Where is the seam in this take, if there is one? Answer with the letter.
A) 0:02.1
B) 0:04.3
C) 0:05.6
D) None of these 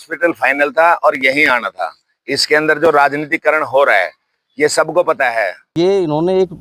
C